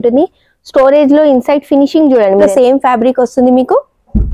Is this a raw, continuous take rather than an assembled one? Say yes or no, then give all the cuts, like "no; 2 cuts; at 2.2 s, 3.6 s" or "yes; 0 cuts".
no; 1 cut; at 2.5 s